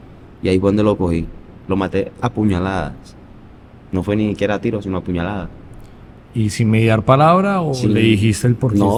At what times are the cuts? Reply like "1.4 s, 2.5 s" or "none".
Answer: none